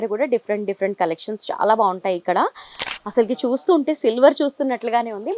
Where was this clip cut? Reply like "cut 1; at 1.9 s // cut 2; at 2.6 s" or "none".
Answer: cut 1; at 2.8 s